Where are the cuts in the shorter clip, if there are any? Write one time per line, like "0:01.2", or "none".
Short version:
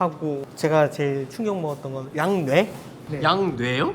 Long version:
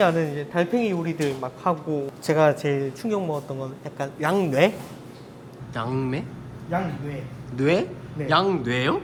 0:02.0
0:03.0